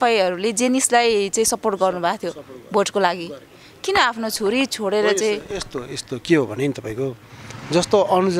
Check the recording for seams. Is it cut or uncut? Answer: uncut